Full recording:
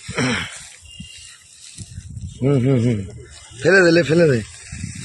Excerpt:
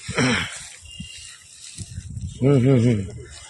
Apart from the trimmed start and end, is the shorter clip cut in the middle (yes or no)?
no